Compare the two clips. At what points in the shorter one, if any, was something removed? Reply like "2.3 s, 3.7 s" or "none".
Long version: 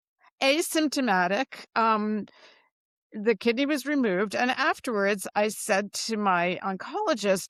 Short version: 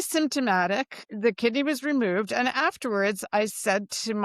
1.0 s